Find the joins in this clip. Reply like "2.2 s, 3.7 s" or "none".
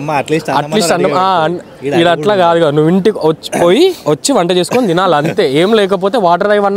none